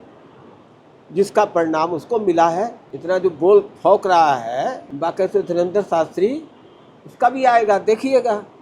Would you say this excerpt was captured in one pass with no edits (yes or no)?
no